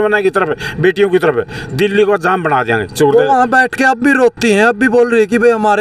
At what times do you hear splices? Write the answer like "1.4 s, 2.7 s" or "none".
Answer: none